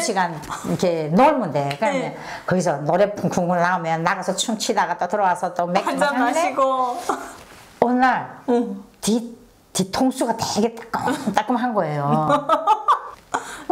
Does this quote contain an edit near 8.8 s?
no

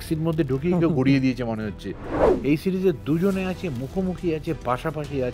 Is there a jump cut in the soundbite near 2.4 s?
yes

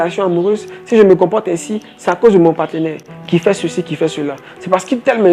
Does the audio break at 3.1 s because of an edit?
yes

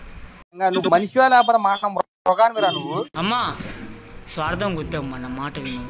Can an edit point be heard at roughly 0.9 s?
no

